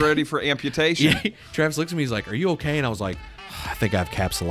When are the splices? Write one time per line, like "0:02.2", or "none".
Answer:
0:01.4